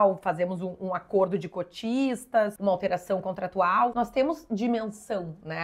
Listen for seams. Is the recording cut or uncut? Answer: cut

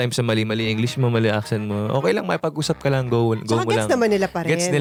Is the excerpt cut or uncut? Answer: uncut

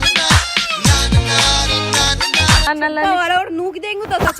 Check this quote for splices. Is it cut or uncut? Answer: cut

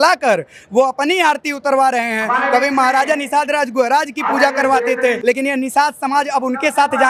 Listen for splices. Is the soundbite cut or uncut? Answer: cut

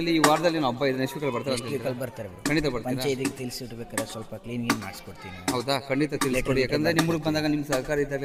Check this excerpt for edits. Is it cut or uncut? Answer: uncut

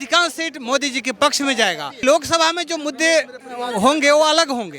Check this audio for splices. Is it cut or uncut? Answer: cut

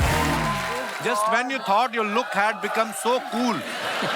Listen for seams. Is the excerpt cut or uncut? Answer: cut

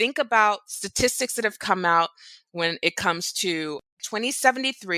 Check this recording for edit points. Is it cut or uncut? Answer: uncut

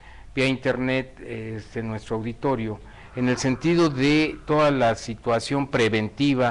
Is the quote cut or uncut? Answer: cut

